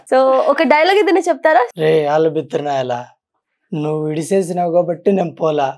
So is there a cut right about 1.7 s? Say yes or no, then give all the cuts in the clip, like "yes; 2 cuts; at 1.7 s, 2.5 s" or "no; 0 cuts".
yes; 1 cut; at 1.7 s